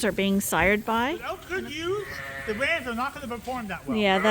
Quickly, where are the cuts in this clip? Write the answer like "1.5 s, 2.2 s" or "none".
1.4 s